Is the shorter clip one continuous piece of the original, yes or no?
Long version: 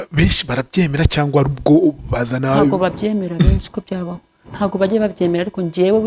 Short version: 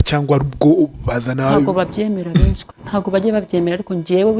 no